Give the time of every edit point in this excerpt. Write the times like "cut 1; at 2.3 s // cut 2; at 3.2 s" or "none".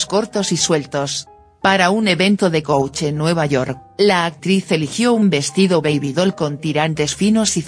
cut 1; at 4.8 s